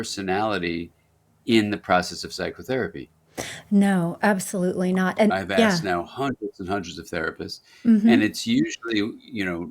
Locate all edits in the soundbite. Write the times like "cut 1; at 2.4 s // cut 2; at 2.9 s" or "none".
cut 1; at 5.3 s